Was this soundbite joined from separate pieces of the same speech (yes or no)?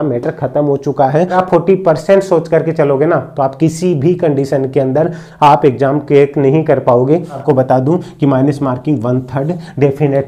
yes